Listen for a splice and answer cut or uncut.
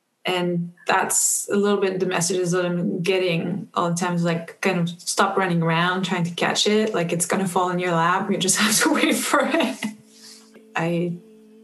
cut